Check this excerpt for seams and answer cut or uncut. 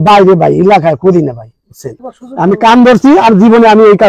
cut